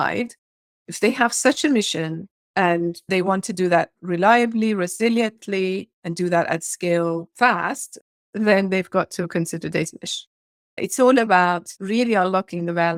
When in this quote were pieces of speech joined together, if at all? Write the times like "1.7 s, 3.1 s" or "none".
none